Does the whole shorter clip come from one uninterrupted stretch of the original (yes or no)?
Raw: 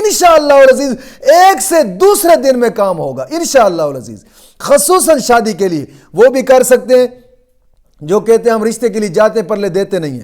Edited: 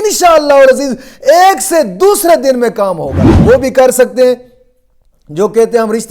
no